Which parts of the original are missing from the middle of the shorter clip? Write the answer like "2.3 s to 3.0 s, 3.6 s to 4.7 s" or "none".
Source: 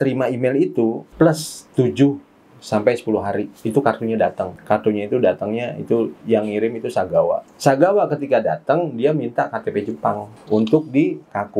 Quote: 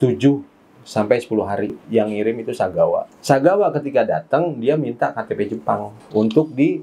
3.6 s to 6.2 s